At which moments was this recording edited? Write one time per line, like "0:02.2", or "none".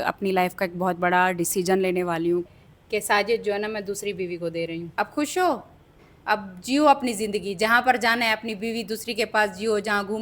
0:02.5
0:04.9